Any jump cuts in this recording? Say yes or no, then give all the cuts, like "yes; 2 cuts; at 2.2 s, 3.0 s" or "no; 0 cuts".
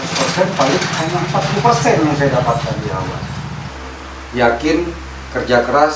yes; 1 cut; at 3.6 s